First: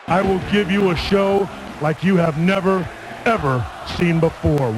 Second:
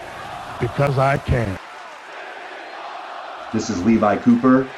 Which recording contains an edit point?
second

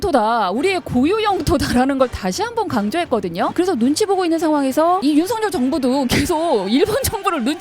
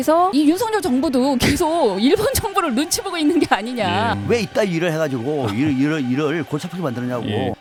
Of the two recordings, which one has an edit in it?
first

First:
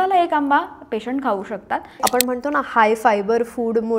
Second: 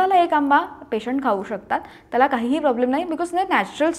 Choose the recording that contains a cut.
first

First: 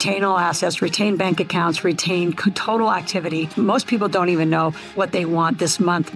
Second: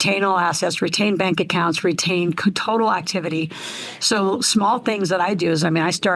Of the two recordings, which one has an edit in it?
first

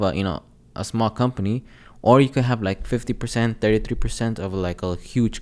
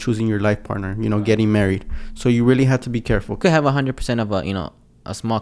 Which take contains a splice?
second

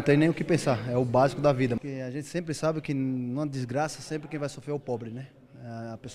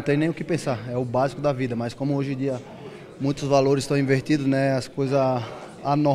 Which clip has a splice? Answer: first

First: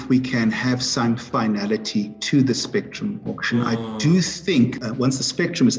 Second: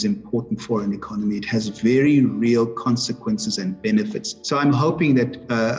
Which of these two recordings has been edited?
first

